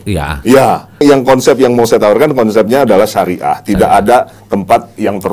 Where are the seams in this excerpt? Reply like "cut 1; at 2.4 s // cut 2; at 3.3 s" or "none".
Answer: cut 1; at 1.0 s